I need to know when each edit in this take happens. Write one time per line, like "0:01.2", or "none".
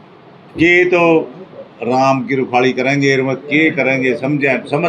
none